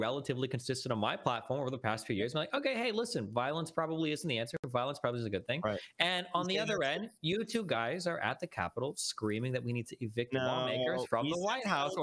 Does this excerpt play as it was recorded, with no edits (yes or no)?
yes